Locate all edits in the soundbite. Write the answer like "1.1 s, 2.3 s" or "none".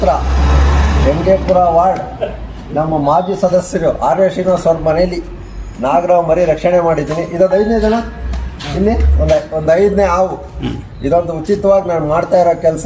none